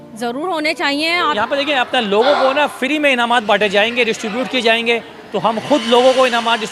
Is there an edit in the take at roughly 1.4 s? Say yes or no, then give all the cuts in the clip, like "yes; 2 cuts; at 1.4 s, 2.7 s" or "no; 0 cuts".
yes; 1 cut; at 1.4 s